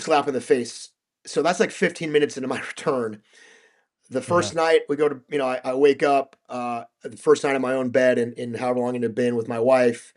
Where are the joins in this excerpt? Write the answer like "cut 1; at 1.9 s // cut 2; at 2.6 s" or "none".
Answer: none